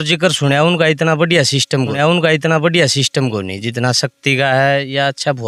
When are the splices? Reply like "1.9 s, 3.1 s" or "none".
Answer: none